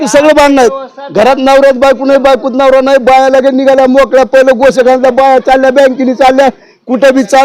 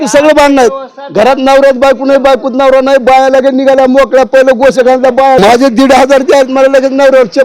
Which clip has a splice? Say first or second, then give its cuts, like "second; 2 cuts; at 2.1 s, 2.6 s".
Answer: second; 1 cut; at 5.4 s